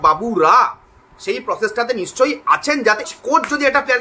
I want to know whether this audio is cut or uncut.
cut